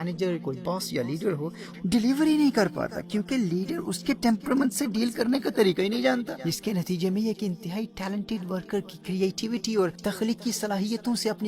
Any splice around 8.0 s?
no; 3 cuts; at 1.7 s, 6.4 s, 10.0 s

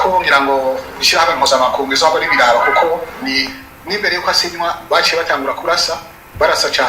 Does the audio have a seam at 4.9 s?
no; 1 cut; at 3.4 s

